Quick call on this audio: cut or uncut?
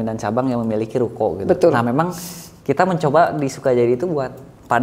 uncut